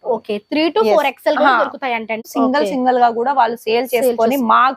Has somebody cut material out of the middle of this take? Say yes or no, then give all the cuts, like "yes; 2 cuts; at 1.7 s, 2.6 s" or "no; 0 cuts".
yes; 1 cut; at 2.3 s